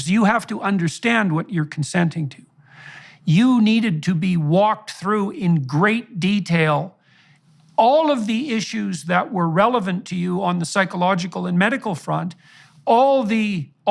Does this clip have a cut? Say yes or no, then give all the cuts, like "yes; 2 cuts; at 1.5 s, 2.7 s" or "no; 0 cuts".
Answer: yes; 1 cut; at 2.9 s